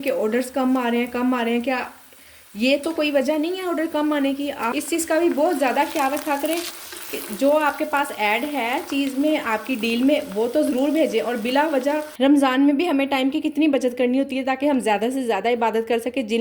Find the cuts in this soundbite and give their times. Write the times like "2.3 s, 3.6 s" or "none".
4.6 s, 12.1 s